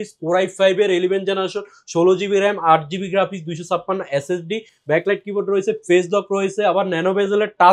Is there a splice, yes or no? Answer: no